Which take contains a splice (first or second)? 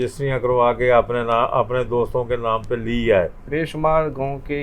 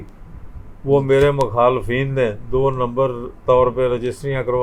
first